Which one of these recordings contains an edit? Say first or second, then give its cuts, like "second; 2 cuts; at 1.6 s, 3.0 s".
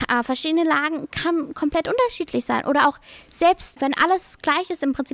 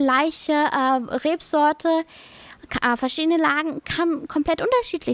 first; 1 cut; at 3.8 s